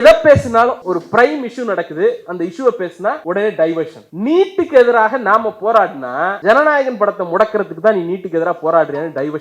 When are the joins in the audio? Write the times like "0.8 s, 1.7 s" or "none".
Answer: 0.8 s, 3.2 s, 4.0 s, 6.4 s